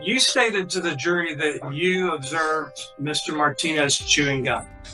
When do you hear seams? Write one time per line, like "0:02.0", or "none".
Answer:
none